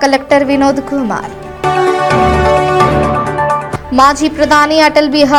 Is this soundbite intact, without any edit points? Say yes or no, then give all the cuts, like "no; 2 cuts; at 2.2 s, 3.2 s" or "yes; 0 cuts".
yes; 0 cuts